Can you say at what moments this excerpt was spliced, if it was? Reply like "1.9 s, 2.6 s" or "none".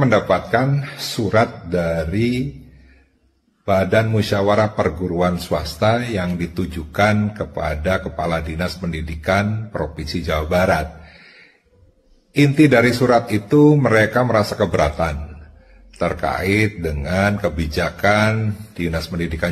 none